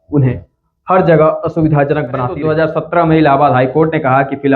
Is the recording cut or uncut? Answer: cut